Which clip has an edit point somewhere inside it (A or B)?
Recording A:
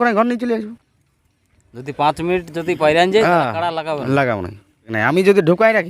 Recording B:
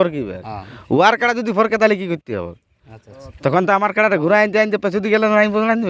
A